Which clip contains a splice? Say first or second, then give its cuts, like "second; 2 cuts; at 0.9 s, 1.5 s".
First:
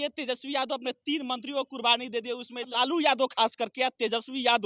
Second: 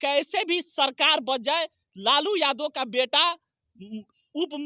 first; 1 cut; at 2.7 s